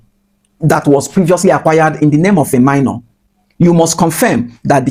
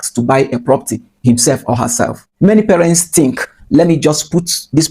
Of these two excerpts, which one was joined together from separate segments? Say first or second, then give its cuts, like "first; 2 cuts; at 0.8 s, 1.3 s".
second; 1 cut; at 2.2 s